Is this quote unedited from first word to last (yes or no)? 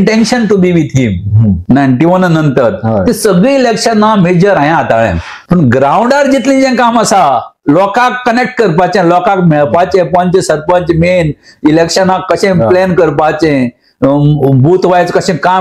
no